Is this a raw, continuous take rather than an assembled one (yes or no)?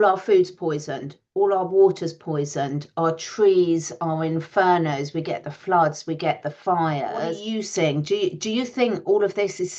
no